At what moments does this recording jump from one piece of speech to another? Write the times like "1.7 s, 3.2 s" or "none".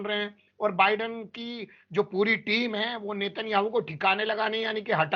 none